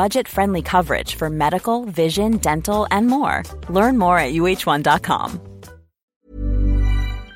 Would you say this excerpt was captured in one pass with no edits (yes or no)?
no